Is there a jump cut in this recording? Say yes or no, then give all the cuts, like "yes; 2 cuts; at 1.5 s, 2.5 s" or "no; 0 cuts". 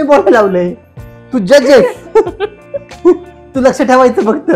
no; 0 cuts